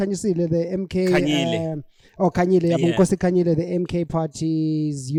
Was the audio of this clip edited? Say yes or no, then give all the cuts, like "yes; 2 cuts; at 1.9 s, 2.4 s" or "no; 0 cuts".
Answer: no; 0 cuts